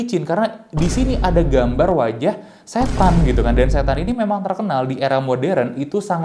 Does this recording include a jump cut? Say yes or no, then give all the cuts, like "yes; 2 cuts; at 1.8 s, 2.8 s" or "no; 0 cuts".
no; 0 cuts